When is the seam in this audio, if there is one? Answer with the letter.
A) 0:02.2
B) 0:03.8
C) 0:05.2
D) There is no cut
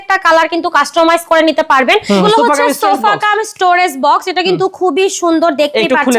A